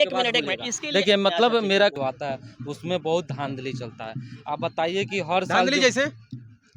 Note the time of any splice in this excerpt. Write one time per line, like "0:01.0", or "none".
0:01.9